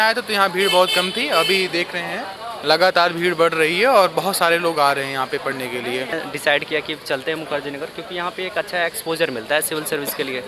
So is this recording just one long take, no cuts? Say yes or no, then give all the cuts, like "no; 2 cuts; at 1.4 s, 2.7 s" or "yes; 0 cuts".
no; 1 cut; at 6.1 s